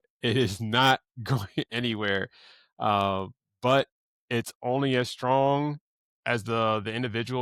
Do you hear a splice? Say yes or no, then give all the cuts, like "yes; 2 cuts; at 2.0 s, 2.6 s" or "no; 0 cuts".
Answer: no; 0 cuts